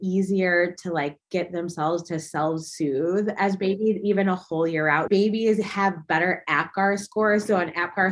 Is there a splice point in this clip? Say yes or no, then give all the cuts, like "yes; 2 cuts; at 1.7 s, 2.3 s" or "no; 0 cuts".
yes; 1 cut; at 5.0 s